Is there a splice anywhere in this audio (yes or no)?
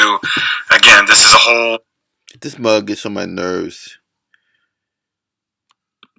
no